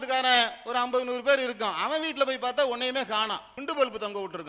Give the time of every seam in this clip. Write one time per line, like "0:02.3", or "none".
0:03.5